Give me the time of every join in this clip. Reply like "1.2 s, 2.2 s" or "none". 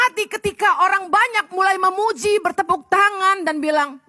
none